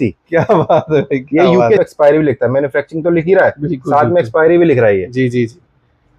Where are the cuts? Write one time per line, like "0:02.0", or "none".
0:01.8